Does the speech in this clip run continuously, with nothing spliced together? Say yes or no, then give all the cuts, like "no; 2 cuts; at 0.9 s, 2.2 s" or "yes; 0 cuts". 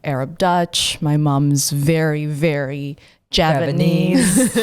yes; 0 cuts